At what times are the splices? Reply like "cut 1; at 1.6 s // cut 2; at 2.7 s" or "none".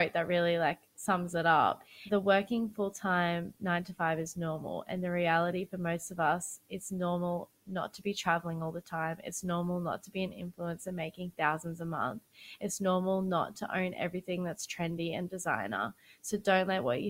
cut 1; at 0.9 s // cut 2; at 2.0 s